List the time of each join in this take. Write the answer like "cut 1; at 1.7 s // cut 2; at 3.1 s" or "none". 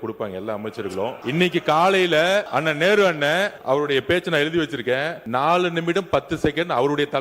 cut 1; at 1.2 s // cut 2; at 2.5 s // cut 3; at 3.6 s // cut 4; at 5.2 s